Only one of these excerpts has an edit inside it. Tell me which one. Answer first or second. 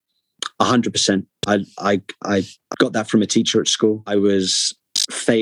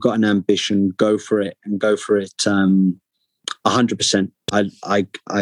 first